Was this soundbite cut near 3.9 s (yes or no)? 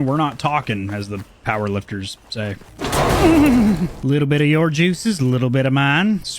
yes